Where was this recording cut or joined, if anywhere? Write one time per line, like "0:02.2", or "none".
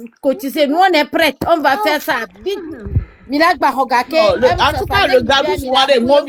none